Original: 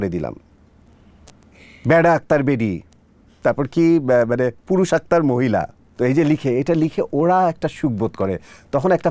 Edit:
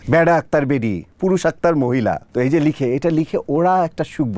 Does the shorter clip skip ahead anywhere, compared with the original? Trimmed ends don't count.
yes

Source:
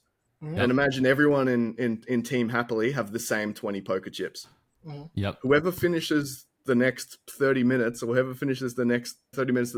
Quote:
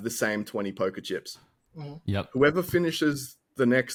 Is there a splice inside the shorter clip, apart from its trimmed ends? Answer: no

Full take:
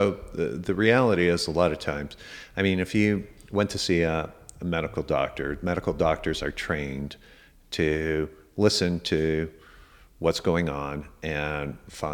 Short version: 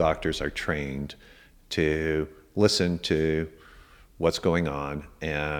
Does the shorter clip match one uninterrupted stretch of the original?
yes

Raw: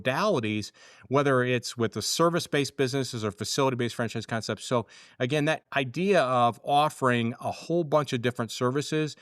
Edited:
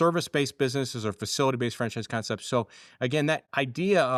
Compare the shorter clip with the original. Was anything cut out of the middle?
no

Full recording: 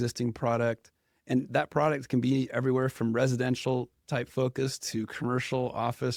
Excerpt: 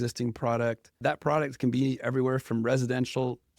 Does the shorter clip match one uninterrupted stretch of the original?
no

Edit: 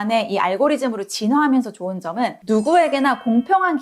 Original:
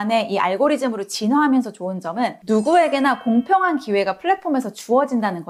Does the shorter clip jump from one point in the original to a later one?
no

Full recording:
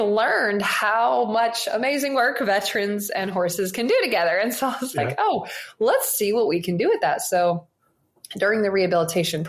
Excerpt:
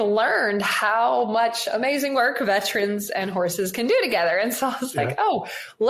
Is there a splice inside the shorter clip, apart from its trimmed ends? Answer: no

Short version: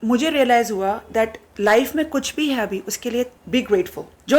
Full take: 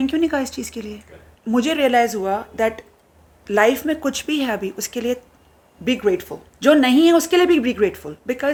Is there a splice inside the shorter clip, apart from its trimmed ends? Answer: yes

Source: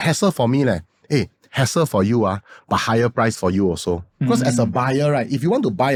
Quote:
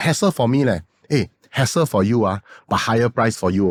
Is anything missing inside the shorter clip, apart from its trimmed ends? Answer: no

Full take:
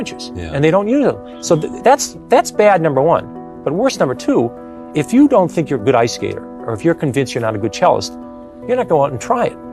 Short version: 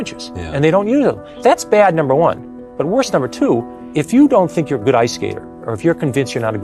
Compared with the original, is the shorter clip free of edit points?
no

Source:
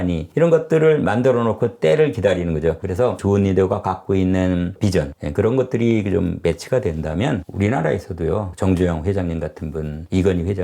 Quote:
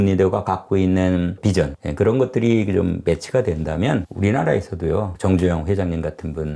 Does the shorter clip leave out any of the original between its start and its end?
no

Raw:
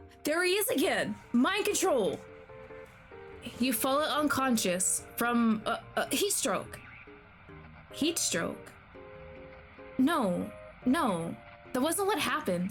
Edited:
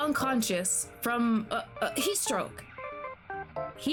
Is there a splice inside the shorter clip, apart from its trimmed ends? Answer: no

